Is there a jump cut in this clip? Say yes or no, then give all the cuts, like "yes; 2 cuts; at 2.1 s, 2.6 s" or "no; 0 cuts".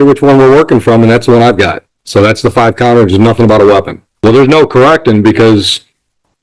yes; 1 cut; at 4.0 s